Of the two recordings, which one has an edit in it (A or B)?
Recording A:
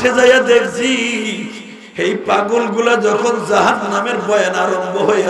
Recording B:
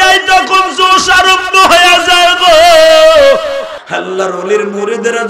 B